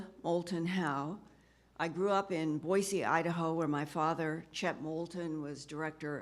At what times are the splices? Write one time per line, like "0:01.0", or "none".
0:01.7